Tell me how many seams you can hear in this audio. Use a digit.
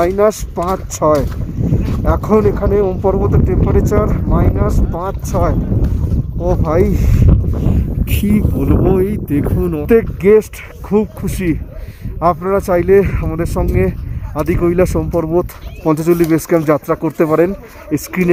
0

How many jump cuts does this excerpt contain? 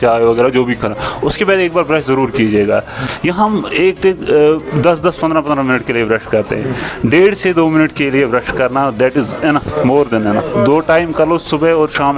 1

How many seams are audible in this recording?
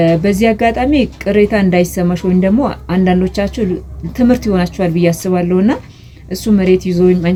0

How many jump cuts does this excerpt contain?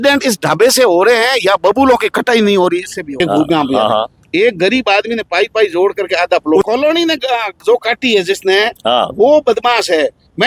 2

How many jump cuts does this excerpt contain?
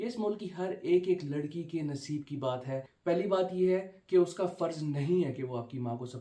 1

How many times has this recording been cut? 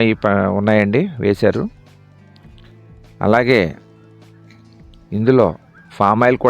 2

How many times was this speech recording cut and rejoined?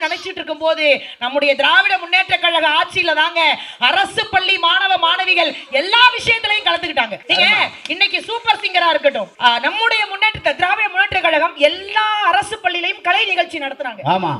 2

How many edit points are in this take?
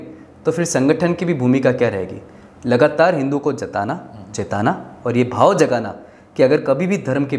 0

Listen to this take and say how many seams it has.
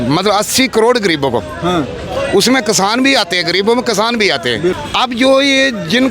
1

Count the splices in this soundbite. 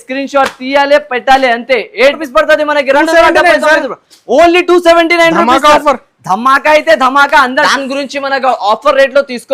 2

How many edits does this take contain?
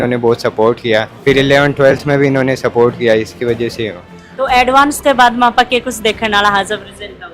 2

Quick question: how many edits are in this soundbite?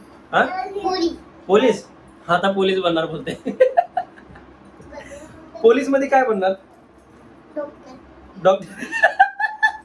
0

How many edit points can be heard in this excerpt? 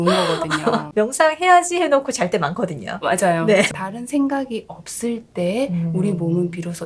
1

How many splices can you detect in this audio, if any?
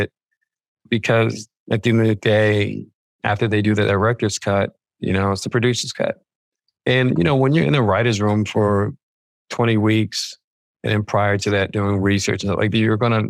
0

